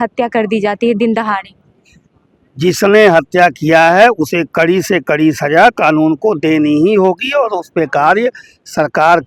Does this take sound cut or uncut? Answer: uncut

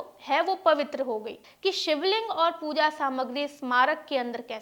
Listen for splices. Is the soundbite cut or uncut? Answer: cut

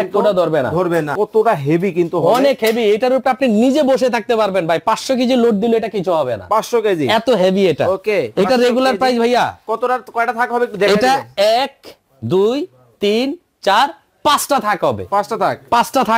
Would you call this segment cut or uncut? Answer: cut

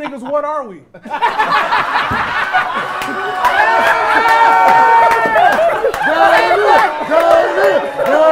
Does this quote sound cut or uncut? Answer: uncut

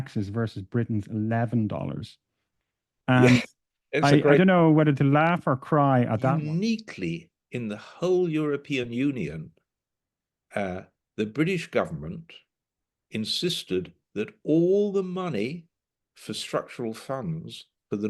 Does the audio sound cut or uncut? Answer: cut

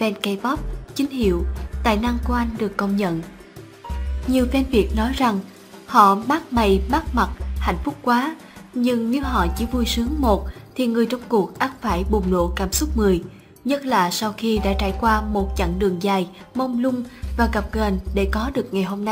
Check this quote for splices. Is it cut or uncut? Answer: uncut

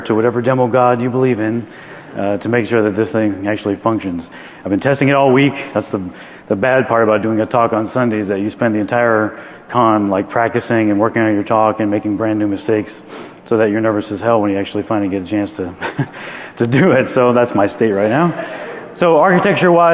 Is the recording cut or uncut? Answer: uncut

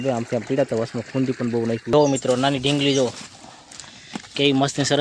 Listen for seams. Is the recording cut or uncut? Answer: cut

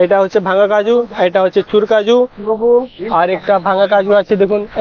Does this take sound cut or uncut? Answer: uncut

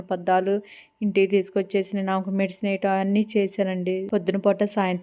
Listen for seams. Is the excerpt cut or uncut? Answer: cut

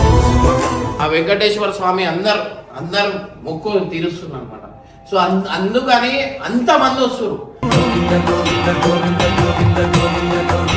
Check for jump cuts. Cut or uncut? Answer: cut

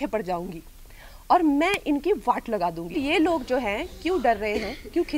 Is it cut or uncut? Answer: cut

